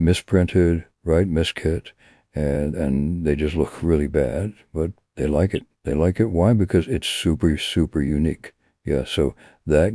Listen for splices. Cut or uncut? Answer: uncut